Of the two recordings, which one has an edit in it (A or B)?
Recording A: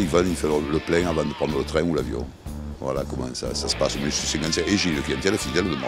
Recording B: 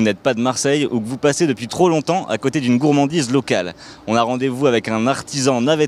A